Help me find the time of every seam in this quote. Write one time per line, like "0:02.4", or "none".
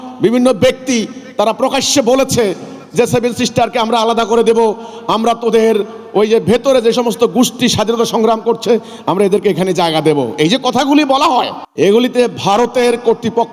0:11.6